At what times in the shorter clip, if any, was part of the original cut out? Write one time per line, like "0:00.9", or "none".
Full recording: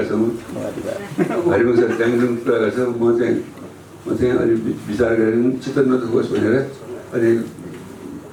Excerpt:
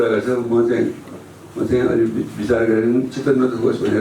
none